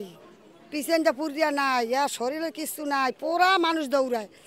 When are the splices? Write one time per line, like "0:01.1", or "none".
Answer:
none